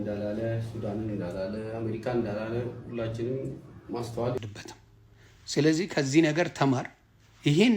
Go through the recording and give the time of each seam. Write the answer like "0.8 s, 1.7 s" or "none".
4.4 s

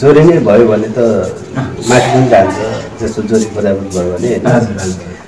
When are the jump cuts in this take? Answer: none

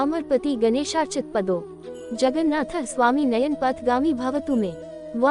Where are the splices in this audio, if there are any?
2.0 s, 4.5 s

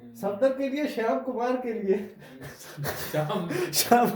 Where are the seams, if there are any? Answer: none

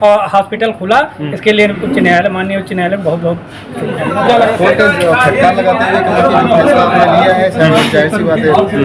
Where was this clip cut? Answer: 4.5 s

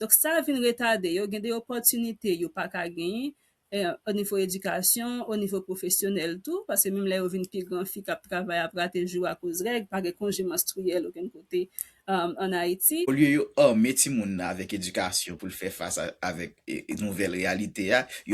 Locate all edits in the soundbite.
13.1 s

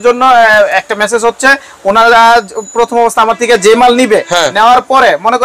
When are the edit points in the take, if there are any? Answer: none

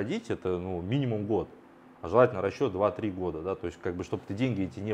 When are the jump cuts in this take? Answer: none

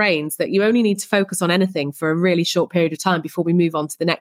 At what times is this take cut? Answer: none

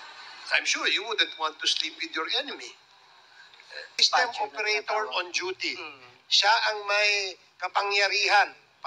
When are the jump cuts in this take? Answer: 4.0 s

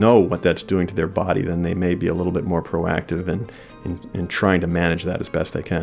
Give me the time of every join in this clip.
none

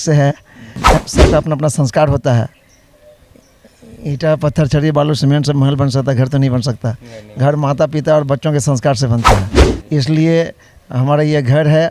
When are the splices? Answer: 1.0 s

